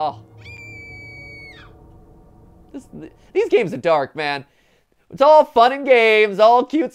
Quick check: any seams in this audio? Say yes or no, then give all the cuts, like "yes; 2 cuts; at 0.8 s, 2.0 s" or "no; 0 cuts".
no; 0 cuts